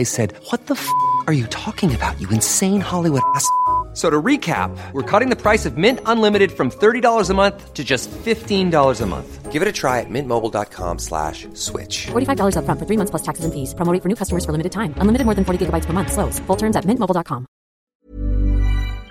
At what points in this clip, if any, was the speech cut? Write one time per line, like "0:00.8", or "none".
0:17.9